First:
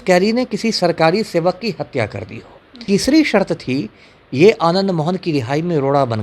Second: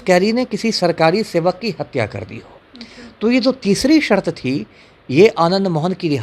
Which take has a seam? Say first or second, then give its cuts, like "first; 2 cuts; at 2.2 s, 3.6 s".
first; 1 cut; at 2.8 s